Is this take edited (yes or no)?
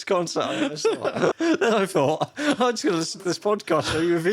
yes